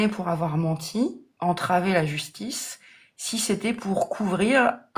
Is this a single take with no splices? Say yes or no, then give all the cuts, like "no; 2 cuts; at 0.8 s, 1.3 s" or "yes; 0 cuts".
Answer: yes; 0 cuts